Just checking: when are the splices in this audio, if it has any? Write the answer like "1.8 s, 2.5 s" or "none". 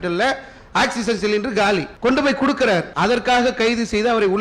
1.9 s, 2.9 s

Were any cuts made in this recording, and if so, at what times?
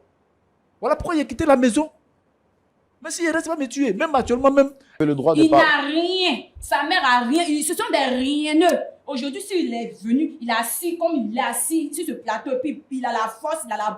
5.0 s

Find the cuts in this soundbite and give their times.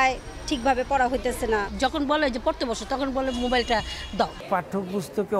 1.7 s, 4.3 s

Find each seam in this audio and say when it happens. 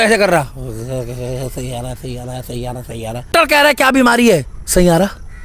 3.3 s

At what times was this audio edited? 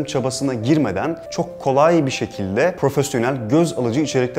1.2 s, 2.8 s

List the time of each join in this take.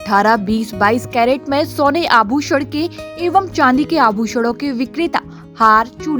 none

